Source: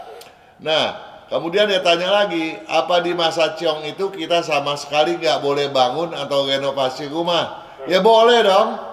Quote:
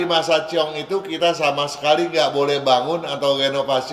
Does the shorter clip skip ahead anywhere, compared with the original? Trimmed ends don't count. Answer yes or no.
no